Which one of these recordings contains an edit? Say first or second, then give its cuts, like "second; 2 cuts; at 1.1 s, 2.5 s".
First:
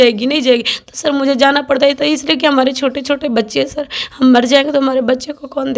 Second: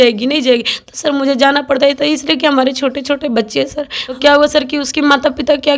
second; 1 cut; at 4.2 s